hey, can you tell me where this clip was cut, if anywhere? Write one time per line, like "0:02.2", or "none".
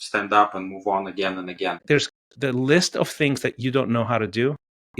0:01.8

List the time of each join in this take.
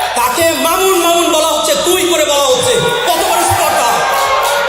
none

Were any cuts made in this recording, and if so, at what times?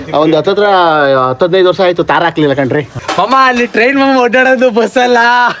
0:03.0

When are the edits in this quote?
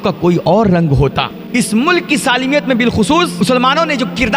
0:01.3
0:03.4

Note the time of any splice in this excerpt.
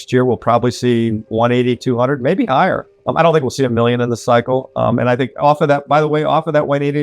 0:02.9

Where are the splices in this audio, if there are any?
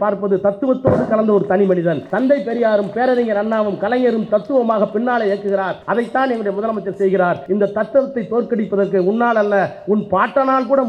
0:02.1
0:05.8
0:07.4

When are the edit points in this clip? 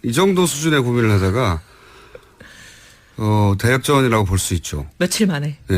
0:03.5

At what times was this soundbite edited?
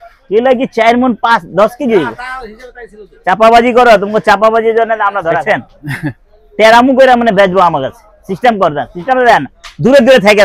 0:05.4

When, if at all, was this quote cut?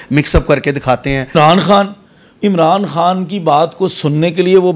0:01.3

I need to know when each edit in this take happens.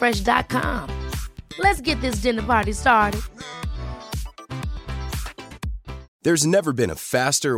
0:06.1

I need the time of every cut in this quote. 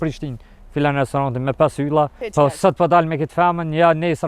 0:02.2

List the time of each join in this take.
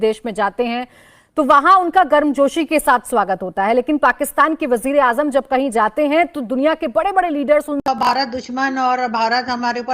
0:08.1

